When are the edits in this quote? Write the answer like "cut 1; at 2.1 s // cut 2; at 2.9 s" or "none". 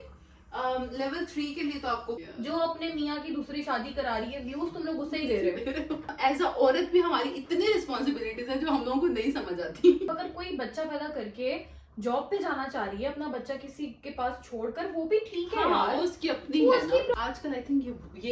cut 1; at 2.2 s // cut 2; at 6.1 s // cut 3; at 10.1 s // cut 4; at 17.1 s